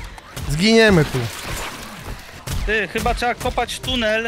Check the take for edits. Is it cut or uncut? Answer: cut